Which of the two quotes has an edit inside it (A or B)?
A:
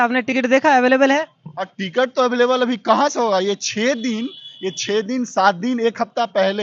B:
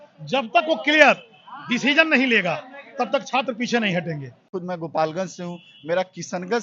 B